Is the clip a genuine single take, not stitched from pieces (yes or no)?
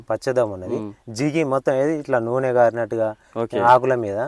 yes